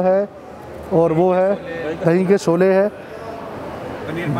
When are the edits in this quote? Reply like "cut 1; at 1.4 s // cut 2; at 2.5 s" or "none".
none